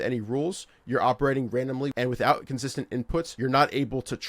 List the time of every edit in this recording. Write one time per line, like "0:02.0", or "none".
0:01.9
0:03.3